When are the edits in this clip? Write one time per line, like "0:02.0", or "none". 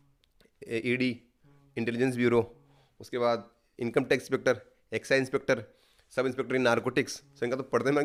none